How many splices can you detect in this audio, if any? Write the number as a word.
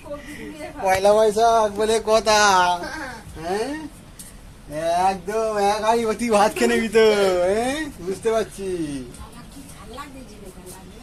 zero